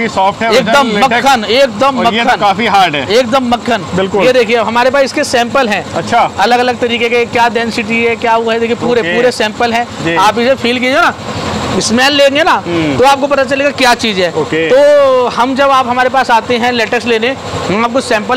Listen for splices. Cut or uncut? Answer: uncut